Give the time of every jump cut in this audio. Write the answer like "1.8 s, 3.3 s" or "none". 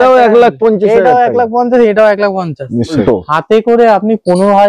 3.0 s